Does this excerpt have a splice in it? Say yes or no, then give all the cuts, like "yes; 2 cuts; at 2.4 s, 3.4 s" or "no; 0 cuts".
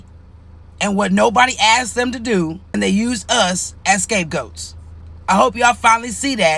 no; 0 cuts